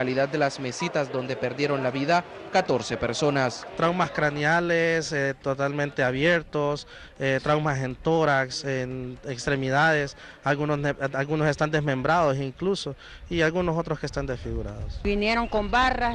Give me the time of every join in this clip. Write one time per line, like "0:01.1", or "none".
0:11.2